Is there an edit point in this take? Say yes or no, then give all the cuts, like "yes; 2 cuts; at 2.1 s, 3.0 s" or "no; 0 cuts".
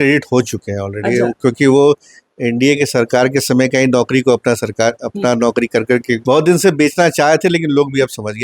yes; 1 cut; at 6.2 s